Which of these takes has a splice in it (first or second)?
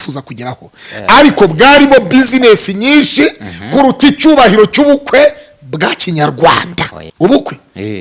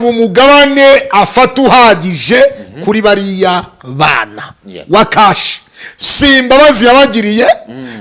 first